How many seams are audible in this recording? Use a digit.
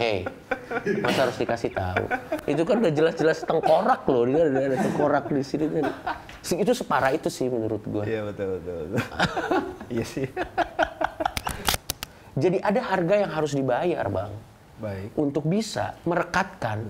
1